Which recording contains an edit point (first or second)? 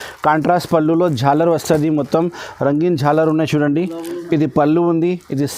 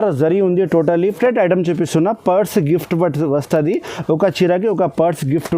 second